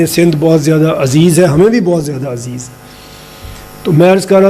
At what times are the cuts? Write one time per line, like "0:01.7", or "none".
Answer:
none